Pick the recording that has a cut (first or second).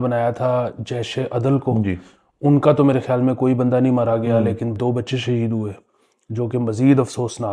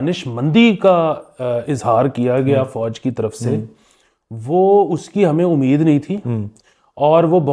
first